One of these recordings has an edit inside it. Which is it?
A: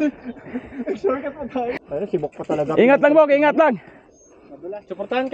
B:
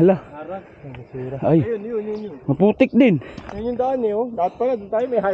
A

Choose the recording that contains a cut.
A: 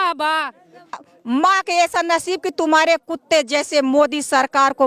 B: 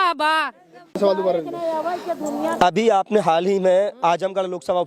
A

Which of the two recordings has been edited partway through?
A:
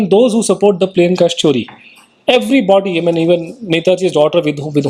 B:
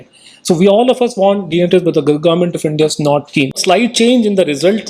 B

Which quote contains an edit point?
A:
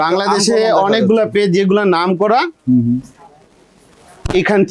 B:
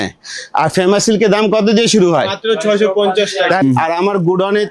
B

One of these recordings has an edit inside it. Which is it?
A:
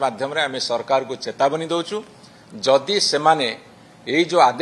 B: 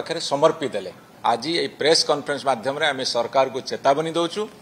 B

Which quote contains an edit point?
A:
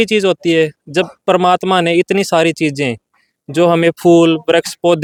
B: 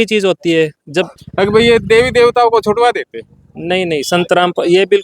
B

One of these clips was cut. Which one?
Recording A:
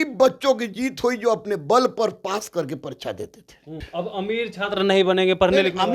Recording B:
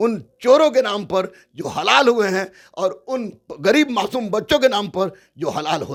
A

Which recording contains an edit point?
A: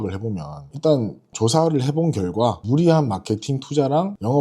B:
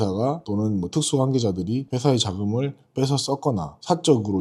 A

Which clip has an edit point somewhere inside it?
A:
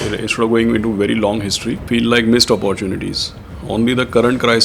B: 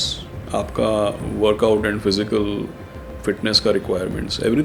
A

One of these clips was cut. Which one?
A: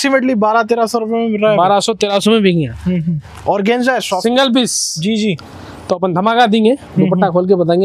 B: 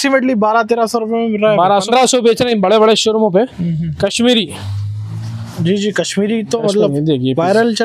B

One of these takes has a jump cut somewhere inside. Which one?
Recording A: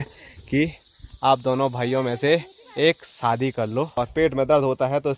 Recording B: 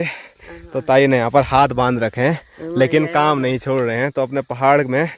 A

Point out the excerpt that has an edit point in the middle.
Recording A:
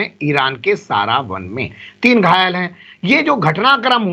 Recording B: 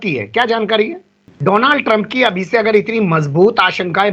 B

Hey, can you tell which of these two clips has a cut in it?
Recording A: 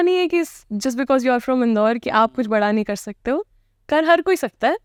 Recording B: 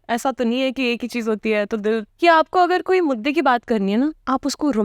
B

